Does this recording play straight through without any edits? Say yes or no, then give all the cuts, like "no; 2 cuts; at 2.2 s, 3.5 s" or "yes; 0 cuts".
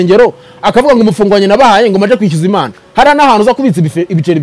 yes; 0 cuts